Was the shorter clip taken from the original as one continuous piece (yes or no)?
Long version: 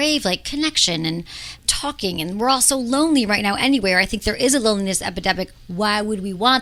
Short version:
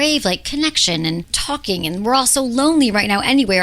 no